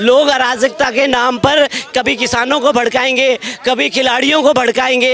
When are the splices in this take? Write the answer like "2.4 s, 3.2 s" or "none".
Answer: none